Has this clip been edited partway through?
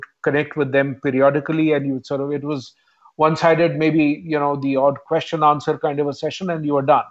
no; 0 cuts

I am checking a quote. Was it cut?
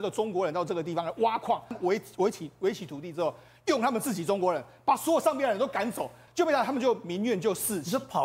yes; 2 cuts; at 1.8 s, 6.2 s

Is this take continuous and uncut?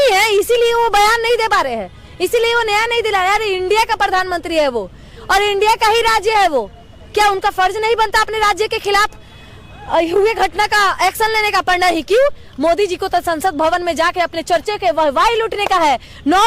yes; 0 cuts

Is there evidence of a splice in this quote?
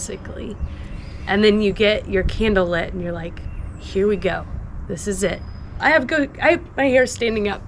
yes; 1 cut; at 5.7 s

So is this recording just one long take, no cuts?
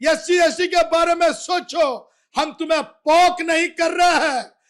yes; 0 cuts

